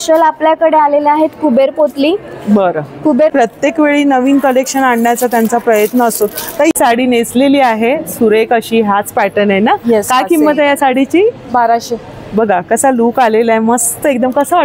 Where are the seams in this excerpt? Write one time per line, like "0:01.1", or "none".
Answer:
0:03.3
0:06.8